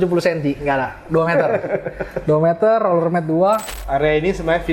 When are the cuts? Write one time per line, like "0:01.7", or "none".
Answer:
0:03.7